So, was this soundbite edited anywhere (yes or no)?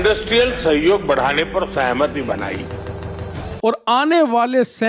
yes